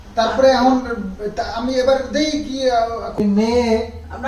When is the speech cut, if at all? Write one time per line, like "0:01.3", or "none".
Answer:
0:03.1